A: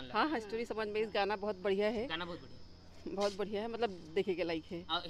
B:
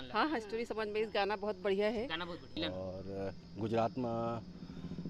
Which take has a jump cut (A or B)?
B